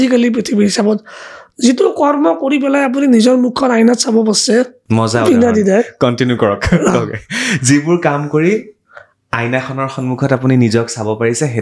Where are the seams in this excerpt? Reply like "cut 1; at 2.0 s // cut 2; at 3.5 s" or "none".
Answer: cut 1; at 4.8 s